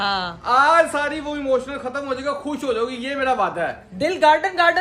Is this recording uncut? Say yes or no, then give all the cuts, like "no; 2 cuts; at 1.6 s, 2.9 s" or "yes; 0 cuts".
yes; 0 cuts